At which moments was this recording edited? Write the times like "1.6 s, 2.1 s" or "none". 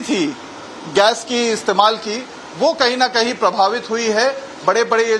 none